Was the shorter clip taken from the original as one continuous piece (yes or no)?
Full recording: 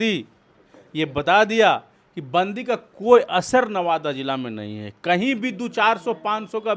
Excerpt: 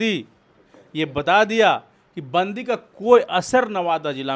yes